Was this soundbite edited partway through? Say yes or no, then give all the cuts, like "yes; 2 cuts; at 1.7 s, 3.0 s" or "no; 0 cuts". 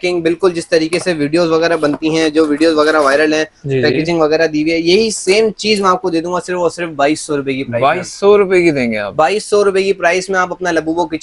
no; 0 cuts